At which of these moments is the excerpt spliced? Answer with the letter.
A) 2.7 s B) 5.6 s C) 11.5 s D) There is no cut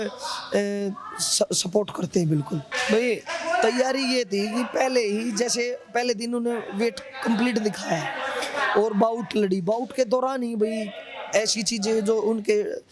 A